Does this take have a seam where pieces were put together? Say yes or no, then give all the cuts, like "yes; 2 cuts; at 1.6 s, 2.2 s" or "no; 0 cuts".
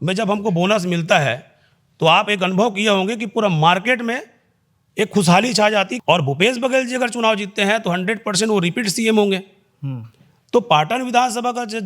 yes; 1 cut; at 5.9 s